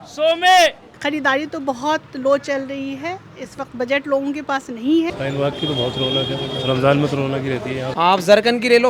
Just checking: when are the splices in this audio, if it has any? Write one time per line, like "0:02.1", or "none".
0:00.9
0:05.1
0:07.8